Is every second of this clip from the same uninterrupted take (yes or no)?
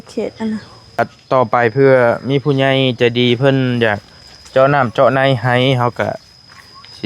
no